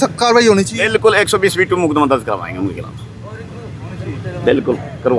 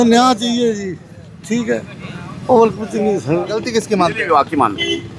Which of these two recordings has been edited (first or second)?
second